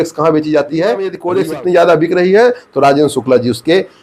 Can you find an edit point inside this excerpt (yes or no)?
yes